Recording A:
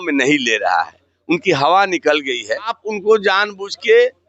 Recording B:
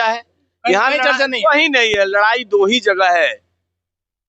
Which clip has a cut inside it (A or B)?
A